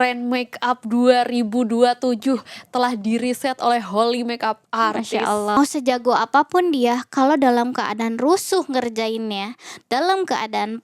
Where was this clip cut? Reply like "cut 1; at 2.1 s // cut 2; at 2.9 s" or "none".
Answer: cut 1; at 5.6 s